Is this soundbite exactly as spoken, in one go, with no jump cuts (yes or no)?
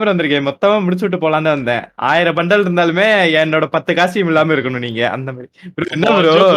yes